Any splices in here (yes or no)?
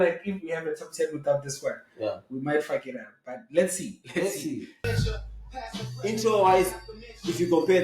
yes